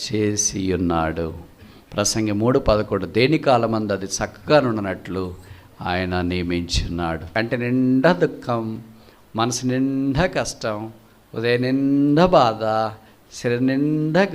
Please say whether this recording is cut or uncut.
cut